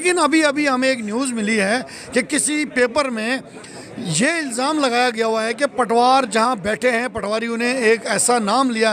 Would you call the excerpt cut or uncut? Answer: uncut